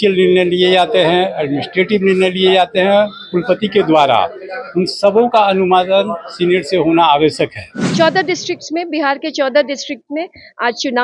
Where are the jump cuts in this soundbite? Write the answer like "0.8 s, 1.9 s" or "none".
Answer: 7.9 s